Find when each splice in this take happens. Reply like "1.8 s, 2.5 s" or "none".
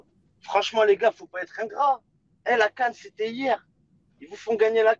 none

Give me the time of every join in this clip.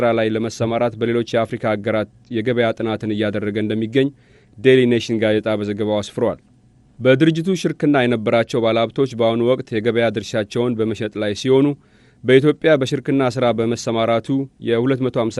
5.5 s

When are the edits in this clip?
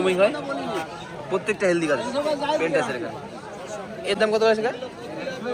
none

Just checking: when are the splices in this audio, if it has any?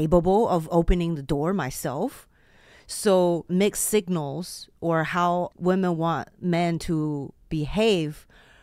3.5 s, 5.5 s

